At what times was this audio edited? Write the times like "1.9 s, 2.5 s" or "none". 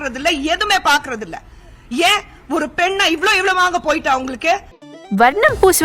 4.8 s